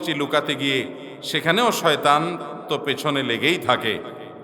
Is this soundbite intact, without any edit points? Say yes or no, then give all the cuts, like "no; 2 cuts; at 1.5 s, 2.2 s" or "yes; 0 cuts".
yes; 0 cuts